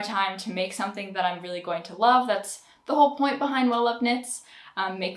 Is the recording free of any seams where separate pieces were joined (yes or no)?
yes